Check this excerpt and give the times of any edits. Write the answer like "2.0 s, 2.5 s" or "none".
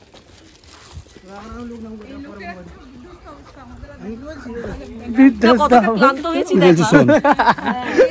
none